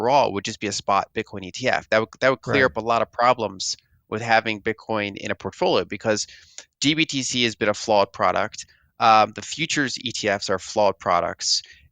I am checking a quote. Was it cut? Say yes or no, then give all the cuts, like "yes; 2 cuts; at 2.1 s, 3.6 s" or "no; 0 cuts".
no; 0 cuts